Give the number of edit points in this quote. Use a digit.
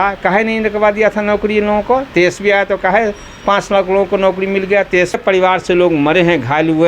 1